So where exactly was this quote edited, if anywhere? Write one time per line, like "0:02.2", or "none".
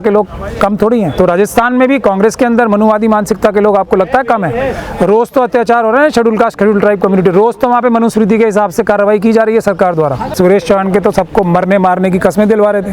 0:01.1
0:10.3